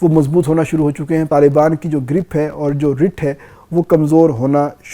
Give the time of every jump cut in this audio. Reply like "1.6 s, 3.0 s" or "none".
1.3 s